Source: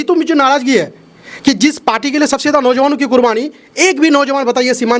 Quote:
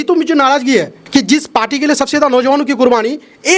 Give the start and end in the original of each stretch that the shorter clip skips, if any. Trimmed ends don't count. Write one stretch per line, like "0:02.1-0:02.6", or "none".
0:01.0-0:01.3